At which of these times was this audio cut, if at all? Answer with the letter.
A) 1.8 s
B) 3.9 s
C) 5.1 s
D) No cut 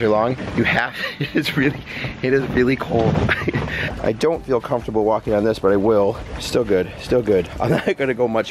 B